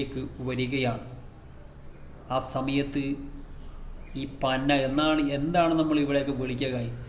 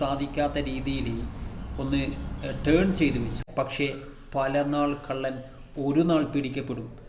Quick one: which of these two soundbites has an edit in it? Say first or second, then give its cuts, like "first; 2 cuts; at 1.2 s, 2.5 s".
second; 1 cut; at 3.4 s